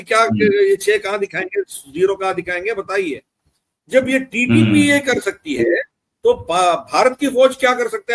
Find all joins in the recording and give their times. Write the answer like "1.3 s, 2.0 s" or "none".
none